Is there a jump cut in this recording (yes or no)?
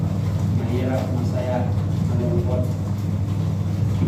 no